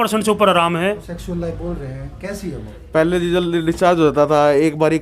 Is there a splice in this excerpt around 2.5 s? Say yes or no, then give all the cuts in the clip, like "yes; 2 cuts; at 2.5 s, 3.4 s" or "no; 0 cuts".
no; 1 cut; at 1.0 s